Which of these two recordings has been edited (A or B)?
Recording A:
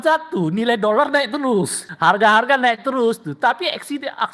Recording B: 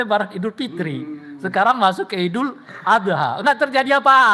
A